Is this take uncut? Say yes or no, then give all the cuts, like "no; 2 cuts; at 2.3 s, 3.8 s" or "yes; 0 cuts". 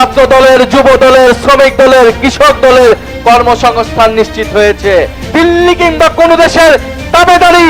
no; 1 cut; at 5.2 s